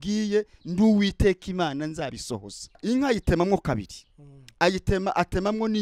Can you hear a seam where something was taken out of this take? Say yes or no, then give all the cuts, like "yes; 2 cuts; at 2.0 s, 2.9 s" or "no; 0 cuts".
yes; 1 cut; at 2.7 s